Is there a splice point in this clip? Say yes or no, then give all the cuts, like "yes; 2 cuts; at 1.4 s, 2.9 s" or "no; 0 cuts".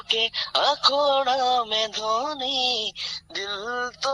no; 0 cuts